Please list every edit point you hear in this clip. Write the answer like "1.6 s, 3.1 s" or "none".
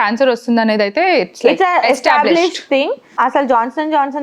3.2 s